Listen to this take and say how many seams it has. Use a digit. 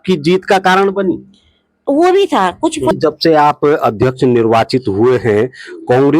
1